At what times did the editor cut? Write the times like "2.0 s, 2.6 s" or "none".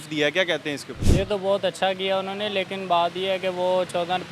0.9 s